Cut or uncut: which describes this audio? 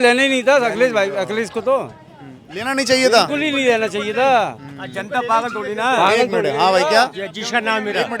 uncut